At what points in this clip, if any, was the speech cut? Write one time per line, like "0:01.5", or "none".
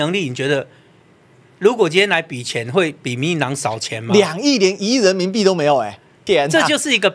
0:06.2